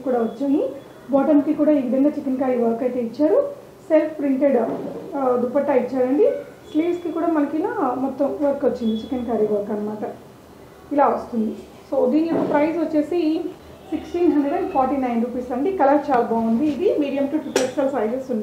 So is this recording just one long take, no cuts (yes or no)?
yes